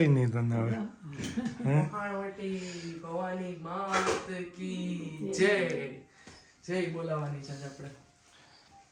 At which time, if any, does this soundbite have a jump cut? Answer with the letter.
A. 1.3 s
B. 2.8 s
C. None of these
C